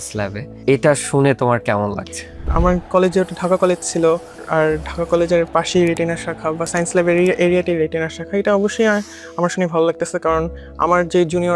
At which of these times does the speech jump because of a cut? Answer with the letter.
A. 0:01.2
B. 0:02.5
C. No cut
B